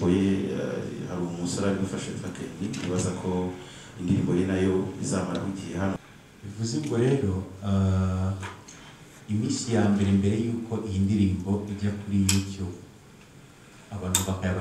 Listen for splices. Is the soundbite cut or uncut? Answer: cut